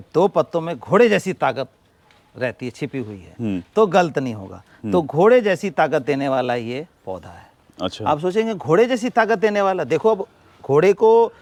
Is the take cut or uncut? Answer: uncut